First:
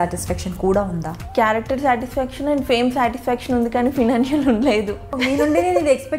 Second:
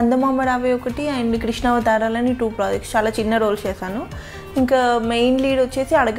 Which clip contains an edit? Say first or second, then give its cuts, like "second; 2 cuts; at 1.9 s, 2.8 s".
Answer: first; 2 cuts; at 1.1 s, 5.2 s